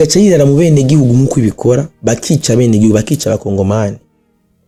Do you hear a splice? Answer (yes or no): no